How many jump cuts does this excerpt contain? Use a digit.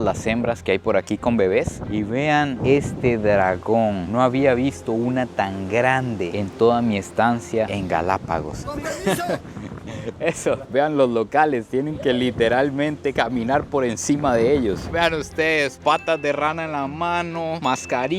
3